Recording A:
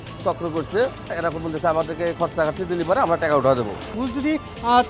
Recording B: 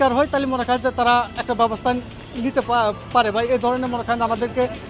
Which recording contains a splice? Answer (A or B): A